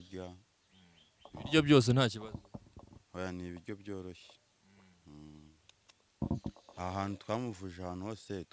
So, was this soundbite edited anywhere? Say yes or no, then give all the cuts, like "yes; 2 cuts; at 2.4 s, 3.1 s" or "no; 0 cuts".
yes; 1 cut; at 6.2 s